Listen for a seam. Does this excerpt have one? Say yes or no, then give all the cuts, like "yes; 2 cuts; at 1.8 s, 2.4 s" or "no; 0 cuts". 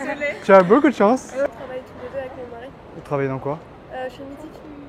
yes; 1 cut; at 1.5 s